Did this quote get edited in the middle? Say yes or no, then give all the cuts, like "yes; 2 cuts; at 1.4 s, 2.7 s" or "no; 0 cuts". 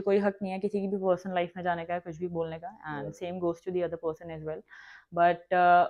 no; 0 cuts